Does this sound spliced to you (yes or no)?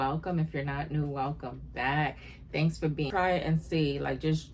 yes